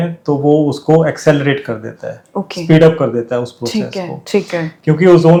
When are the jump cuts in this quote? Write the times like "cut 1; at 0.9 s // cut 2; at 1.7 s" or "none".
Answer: none